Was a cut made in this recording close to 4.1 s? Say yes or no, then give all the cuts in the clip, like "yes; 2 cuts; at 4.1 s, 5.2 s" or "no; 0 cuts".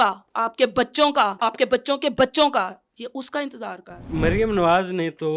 yes; 2 cuts; at 1.3 s, 4.1 s